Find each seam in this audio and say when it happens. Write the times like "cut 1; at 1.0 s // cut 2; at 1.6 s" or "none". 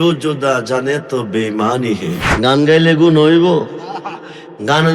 cut 1; at 2.3 s